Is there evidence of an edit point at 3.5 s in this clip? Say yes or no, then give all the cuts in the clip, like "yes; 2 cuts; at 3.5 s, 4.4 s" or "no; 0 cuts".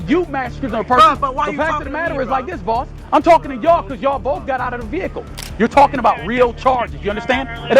no; 1 cut; at 5.4 s